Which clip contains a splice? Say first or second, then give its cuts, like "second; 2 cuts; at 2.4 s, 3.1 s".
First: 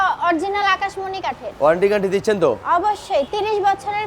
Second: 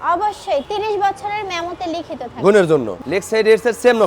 second; 1 cut; at 3.0 s